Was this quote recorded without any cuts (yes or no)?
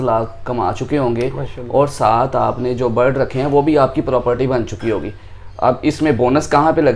yes